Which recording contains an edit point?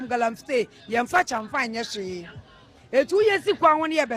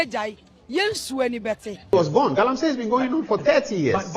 second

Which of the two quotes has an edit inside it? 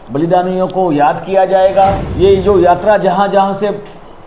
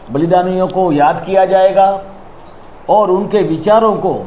first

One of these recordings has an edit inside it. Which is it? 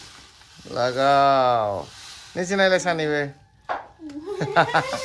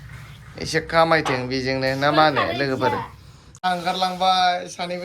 second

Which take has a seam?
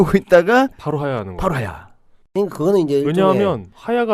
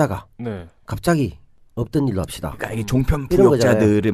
first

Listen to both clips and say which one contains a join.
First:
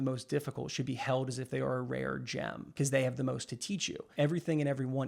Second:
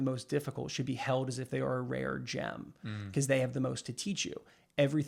first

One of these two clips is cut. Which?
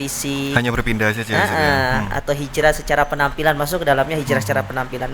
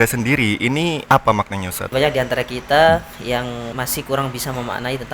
second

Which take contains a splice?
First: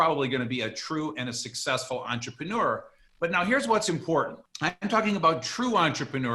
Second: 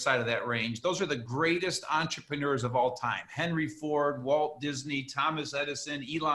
first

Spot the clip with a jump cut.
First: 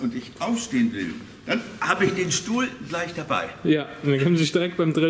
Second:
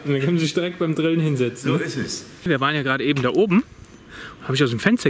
second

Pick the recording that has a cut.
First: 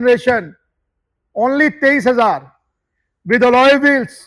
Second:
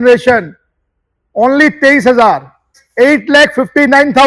second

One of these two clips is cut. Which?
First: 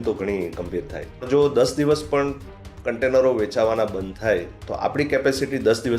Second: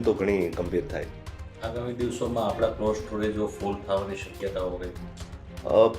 first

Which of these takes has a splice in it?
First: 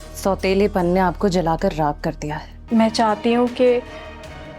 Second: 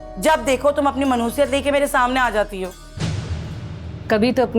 first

